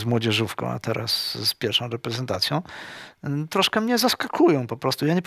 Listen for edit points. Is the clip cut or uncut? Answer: uncut